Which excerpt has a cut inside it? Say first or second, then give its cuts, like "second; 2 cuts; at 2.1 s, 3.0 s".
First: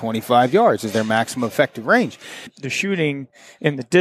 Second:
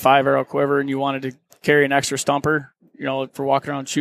first; 1 cut; at 2.5 s